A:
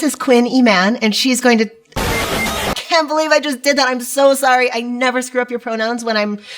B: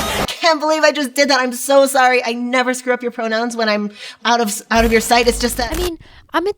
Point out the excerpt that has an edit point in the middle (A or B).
B